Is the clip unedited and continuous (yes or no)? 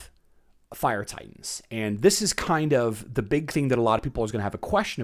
yes